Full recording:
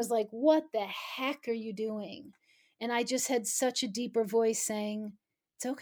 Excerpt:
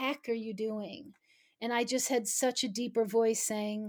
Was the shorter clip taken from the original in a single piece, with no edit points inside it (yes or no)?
yes